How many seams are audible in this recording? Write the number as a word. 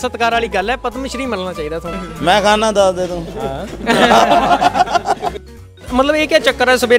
two